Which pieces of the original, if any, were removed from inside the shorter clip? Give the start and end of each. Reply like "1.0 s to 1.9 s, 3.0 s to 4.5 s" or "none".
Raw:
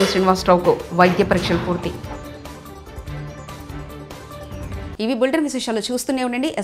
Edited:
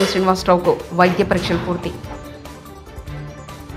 none